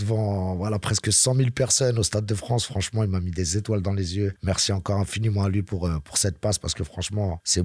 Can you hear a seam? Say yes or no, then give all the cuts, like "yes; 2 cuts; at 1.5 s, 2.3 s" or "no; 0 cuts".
no; 0 cuts